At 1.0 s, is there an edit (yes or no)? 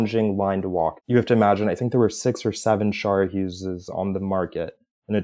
yes